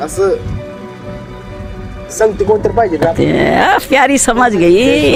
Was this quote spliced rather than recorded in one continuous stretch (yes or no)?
no